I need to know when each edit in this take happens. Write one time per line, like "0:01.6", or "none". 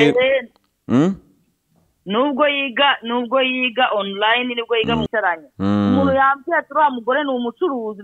0:05.1